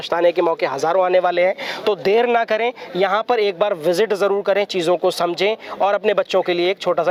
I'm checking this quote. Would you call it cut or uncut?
uncut